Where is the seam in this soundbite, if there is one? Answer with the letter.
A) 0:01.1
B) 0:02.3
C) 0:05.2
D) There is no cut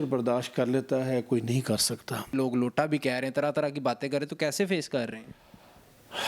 B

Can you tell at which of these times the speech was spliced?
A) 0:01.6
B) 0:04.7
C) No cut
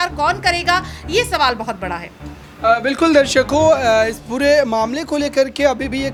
C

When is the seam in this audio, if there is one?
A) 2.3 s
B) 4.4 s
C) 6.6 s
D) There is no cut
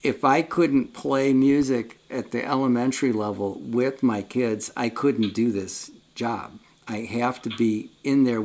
D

